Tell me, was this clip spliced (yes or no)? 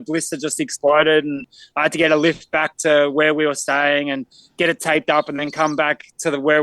no